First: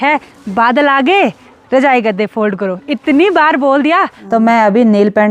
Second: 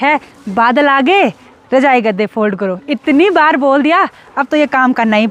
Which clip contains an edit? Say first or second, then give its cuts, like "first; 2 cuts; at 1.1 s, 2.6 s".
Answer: first; 1 cut; at 4.2 s